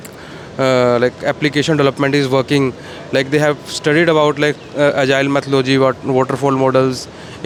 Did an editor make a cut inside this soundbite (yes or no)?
no